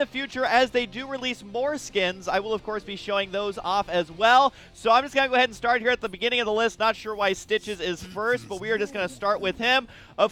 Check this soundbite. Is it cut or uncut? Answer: cut